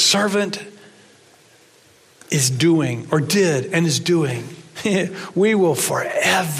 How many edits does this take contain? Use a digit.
0